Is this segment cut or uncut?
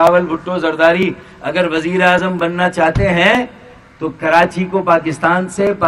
uncut